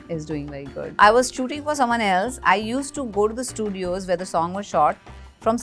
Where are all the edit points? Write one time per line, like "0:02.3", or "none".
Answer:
0:01.0